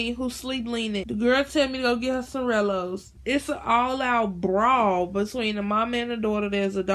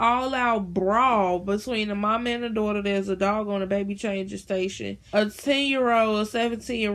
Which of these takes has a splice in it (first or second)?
first